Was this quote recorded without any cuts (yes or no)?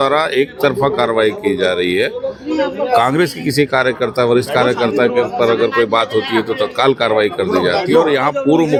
yes